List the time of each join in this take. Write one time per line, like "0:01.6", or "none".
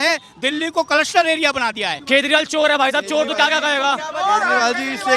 0:01.9